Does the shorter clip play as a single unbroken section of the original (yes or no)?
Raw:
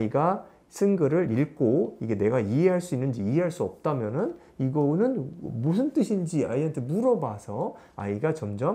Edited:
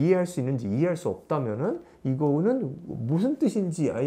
yes